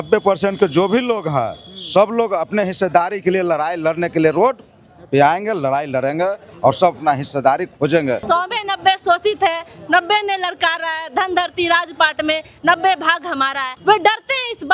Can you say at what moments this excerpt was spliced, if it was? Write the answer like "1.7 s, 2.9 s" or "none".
8.2 s, 13.7 s